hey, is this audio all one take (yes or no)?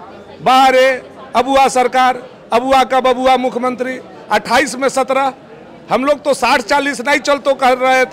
yes